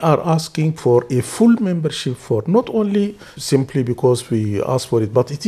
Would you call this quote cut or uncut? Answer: cut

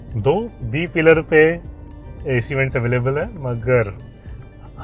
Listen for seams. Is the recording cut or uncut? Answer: uncut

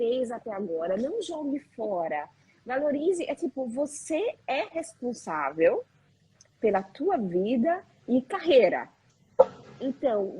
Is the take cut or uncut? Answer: uncut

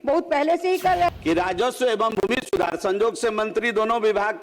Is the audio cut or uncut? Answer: cut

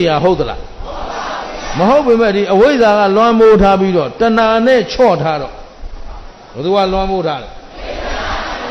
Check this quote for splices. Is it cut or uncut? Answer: uncut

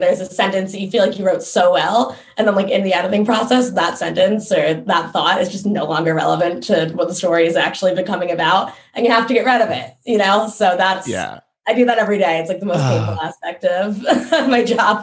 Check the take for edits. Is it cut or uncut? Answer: uncut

